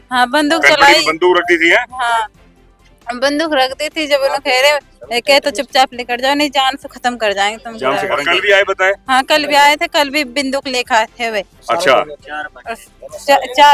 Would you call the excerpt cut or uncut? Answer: cut